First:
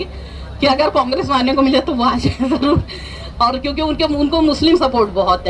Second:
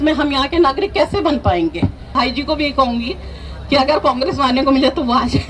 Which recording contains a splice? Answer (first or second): second